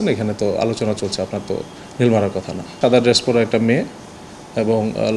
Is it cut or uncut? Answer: cut